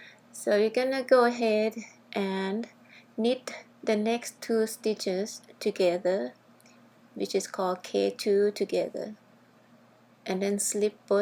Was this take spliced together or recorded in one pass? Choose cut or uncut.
uncut